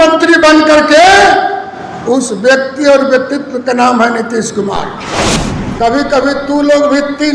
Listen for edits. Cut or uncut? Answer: cut